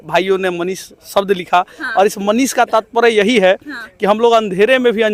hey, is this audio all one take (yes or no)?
yes